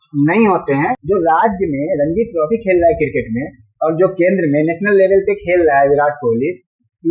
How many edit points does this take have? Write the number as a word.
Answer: one